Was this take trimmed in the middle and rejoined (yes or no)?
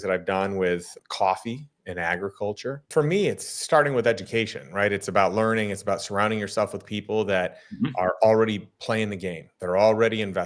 yes